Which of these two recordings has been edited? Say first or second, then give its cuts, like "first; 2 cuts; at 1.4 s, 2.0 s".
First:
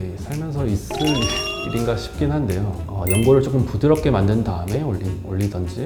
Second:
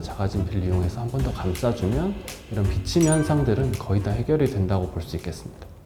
first; 1 cut; at 2.8 s